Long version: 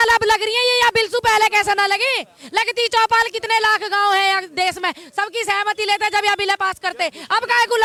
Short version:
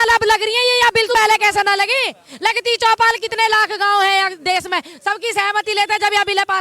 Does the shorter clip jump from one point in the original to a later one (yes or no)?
yes